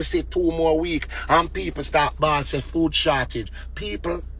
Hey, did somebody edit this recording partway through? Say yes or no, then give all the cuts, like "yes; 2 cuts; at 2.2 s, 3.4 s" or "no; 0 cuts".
no; 0 cuts